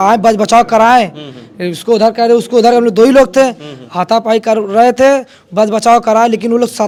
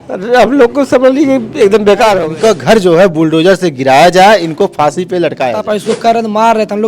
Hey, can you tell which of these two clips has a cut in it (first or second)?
second